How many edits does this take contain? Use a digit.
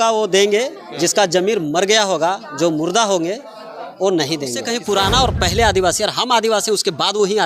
1